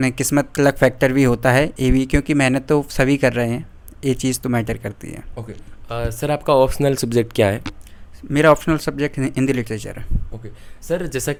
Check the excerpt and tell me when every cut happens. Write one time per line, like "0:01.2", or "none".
none